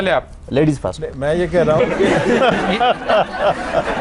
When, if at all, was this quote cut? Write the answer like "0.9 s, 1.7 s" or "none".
none